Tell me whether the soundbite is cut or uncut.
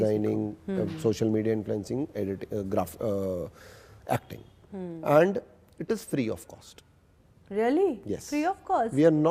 uncut